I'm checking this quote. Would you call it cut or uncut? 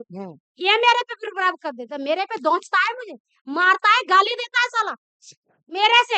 uncut